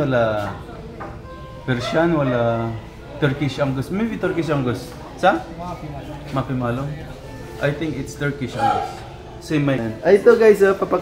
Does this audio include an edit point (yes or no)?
yes